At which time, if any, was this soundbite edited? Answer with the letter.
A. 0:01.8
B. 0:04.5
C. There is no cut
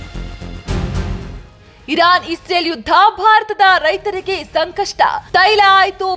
A